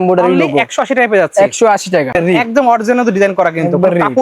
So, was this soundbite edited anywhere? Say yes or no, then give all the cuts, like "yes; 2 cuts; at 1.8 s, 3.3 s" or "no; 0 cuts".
yes; 1 cut; at 2.1 s